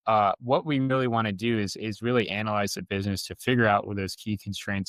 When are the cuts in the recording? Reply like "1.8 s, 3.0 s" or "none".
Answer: none